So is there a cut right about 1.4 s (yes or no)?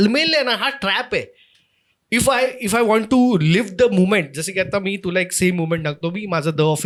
no